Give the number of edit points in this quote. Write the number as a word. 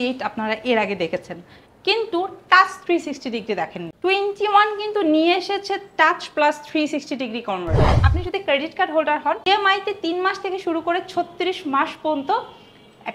two